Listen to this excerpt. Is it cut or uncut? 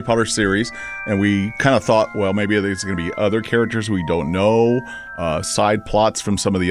uncut